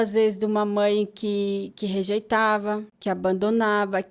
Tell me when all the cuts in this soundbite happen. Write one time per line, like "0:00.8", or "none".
0:02.9